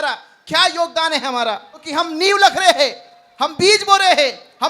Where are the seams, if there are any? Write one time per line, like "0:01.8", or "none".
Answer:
0:01.9